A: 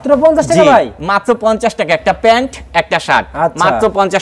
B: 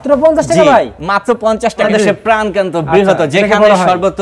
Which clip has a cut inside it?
B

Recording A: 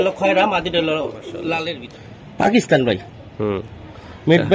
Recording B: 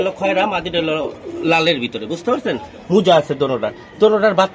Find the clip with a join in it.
A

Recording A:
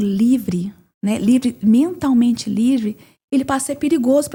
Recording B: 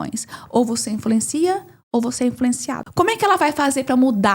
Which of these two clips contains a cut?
B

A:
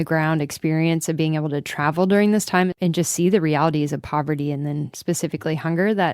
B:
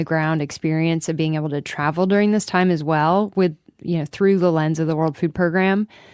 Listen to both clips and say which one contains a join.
A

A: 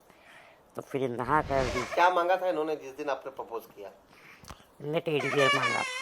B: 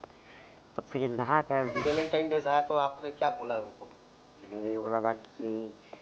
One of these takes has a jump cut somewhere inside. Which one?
B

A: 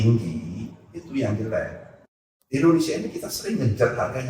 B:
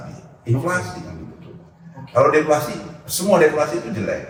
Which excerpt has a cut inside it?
A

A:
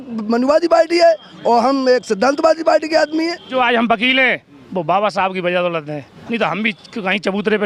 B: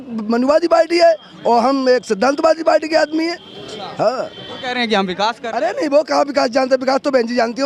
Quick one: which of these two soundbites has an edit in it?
A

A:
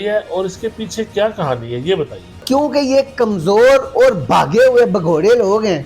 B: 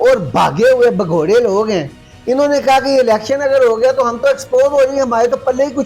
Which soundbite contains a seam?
A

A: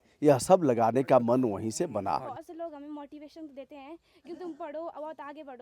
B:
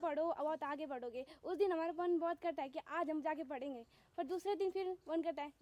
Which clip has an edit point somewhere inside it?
A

